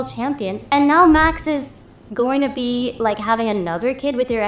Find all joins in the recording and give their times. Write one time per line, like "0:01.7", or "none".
none